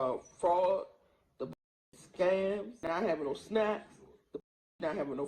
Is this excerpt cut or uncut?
cut